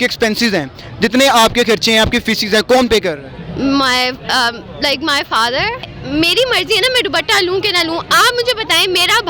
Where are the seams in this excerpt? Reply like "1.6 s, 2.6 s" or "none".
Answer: 5.8 s